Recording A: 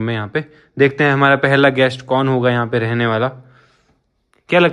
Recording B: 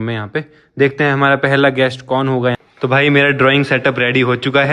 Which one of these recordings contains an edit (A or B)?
B